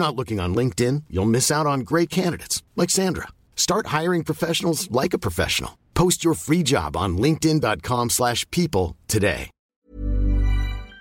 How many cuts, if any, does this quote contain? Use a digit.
1